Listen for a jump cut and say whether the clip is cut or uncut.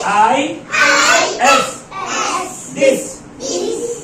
uncut